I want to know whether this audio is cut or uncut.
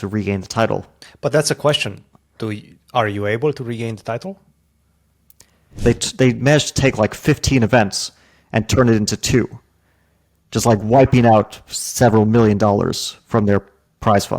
cut